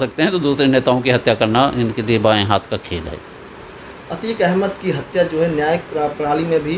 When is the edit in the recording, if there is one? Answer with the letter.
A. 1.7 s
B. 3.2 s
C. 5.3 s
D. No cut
D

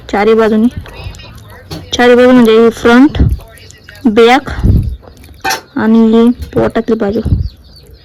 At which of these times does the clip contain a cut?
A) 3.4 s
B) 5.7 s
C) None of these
C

